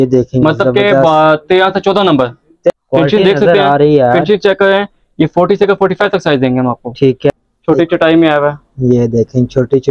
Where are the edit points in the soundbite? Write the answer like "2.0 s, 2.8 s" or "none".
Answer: 2.7 s, 7.3 s

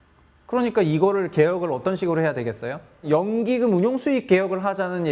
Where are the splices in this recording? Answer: 3.0 s

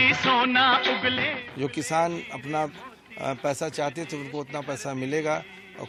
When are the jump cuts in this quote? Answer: none

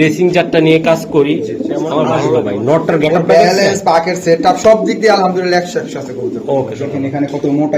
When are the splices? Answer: 2.1 s, 6.8 s

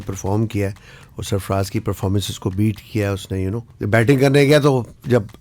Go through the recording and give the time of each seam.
3.7 s

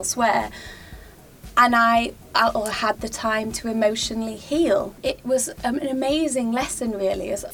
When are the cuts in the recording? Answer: none

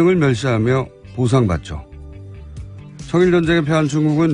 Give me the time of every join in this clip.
none

